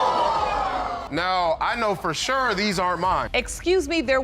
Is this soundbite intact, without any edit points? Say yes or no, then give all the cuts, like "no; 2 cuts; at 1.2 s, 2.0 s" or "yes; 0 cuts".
no; 1 cut; at 3.3 s